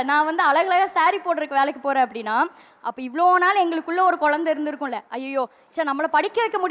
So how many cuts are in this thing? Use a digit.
1